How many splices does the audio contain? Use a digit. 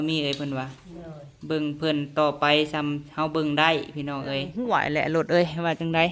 1